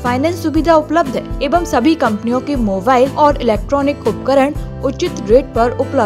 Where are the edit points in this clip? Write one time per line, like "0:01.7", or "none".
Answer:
0:01.4
0:03.1